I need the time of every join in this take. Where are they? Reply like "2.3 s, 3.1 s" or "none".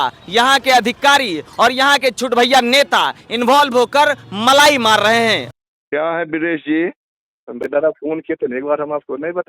5.5 s, 7.6 s